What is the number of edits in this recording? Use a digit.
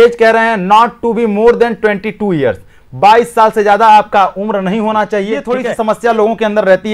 1